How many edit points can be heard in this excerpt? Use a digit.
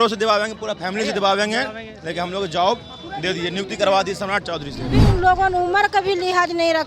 1